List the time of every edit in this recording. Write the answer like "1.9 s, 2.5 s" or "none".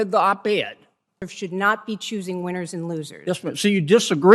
1.2 s